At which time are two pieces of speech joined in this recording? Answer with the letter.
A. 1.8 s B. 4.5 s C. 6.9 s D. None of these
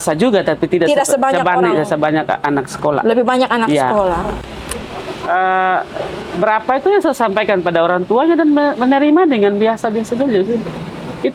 B